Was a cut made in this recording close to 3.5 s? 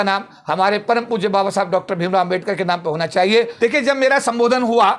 yes; 1 cut; at 3.5 s

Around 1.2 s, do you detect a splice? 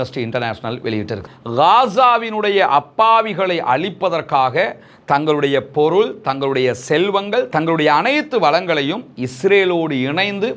yes; 1 cut; at 1.2 s

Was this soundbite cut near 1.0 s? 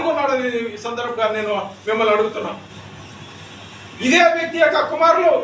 yes; 1 cut; at 1.0 s

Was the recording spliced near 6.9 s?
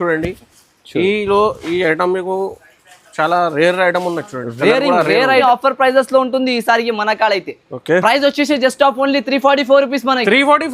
no; 1 cut; at 5.4 s

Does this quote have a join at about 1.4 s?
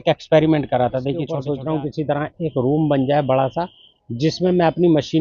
yes; 1 cut; at 1.4 s

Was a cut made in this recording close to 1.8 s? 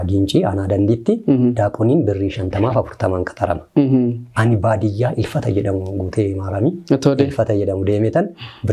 no; 0 cuts

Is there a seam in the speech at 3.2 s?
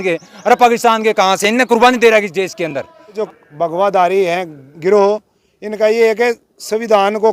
yes; 1 cut; at 3.2 s

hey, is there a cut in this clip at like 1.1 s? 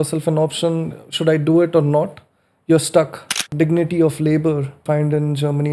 no; 2 cuts; at 3.4 s, 4.8 s

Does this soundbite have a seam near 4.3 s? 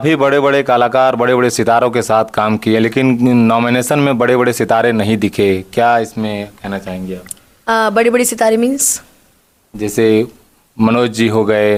no; 0 cuts

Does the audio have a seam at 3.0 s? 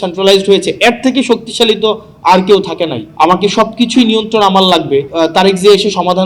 yes; 2 cuts; at 3.0 s, 5.1 s

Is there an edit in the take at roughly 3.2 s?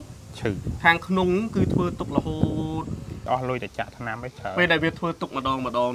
yes; 1 cut; at 3.2 s

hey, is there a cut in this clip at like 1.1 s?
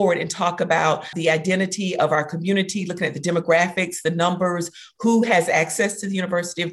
yes; 1 cut; at 1.1 s

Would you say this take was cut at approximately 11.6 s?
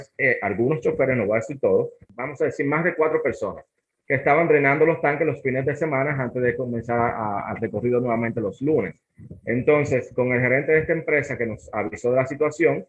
no; 1 cut; at 2.0 s

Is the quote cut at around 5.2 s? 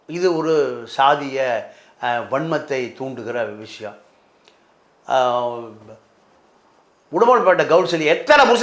no; 0 cuts

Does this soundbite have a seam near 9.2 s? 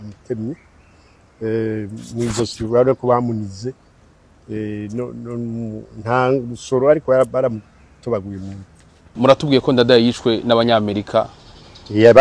yes; 1 cut; at 9.2 s

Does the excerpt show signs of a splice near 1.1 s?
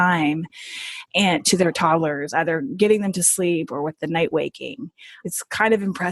no; 1 cut; at 5.2 s

